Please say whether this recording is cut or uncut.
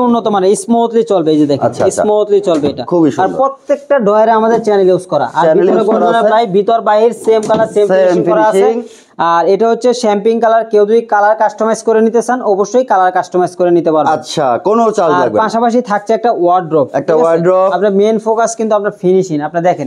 uncut